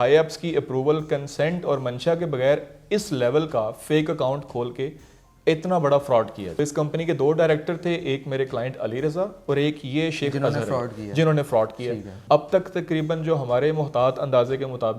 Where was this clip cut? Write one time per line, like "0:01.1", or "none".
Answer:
0:06.6
0:12.1